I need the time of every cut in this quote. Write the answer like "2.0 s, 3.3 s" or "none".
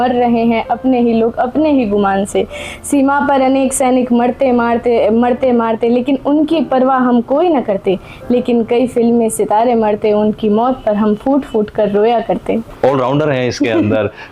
12.7 s